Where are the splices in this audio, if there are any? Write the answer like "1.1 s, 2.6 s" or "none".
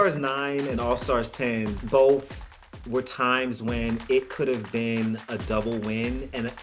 1.8 s